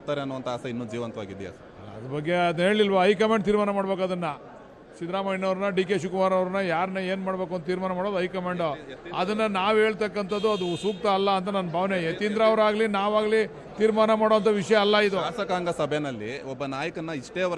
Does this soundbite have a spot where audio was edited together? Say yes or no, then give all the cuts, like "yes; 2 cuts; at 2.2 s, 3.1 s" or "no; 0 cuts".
no; 0 cuts